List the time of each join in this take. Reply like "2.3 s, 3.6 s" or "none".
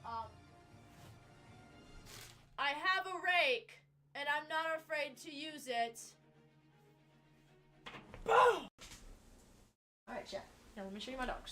7.8 s